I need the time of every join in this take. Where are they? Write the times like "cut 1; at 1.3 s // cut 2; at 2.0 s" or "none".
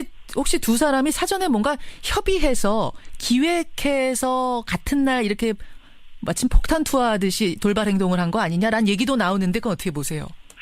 cut 1; at 8.5 s